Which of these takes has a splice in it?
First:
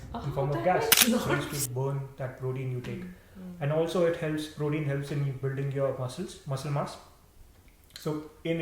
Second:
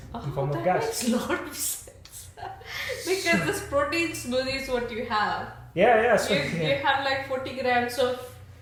first; 1 cut; at 1.5 s

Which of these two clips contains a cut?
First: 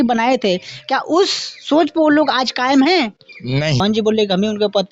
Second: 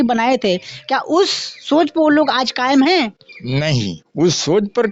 first; 1 cut; at 3.8 s

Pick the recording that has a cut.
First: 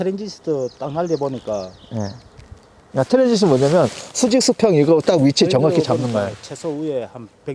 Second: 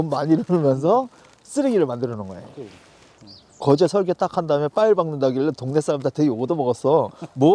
second; 1 cut; at 3.2 s

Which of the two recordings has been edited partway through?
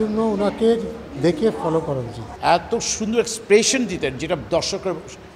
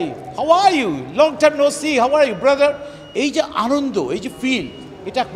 first; 1 cut; at 2.2 s

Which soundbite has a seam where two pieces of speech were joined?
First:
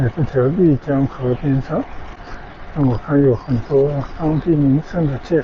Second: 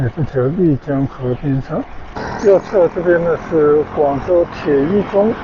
second; 1 cut; at 2.2 s

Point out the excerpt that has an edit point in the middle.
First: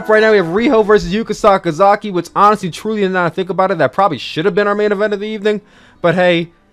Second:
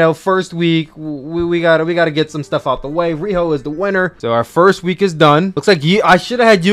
second; 2 cuts; at 4.2 s, 5.6 s

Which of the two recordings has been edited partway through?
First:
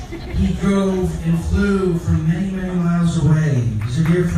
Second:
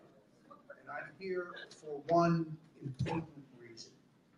second; 1 cut; at 3.4 s

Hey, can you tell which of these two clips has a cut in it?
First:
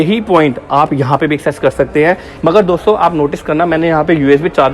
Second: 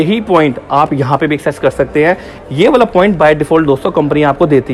first; 1 cut; at 2.3 s

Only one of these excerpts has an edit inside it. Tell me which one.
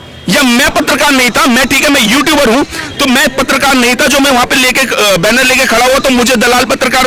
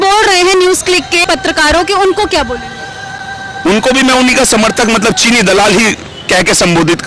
second; 1 cut; at 1.2 s

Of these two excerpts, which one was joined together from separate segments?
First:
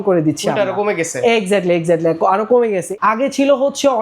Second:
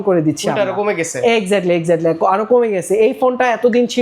first; 1 cut; at 2.9 s

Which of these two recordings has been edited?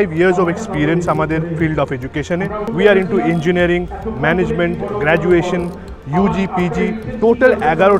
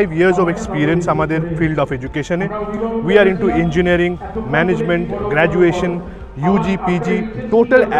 first; 1 cut; at 2.7 s

